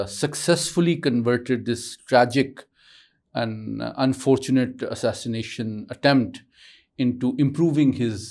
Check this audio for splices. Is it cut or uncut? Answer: uncut